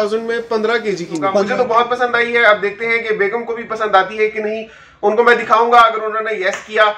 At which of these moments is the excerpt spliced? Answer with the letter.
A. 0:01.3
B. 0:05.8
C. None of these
A